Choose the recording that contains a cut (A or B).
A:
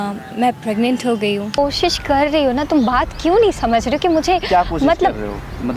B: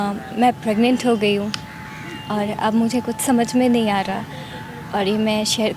A